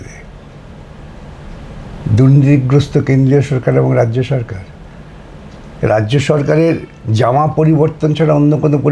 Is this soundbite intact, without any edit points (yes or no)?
yes